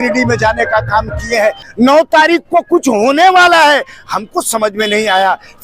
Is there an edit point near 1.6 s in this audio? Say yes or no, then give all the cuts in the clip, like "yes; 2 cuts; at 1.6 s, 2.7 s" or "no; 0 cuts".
yes; 1 cut; at 1.6 s